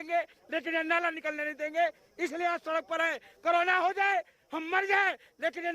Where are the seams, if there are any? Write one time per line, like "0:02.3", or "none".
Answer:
none